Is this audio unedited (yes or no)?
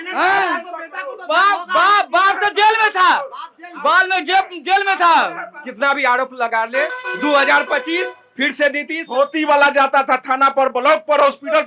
no